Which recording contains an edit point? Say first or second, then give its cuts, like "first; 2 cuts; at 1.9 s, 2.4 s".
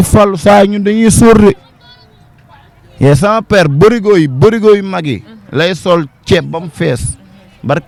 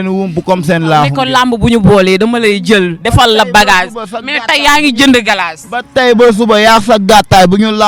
second; 1 cut; at 1.1 s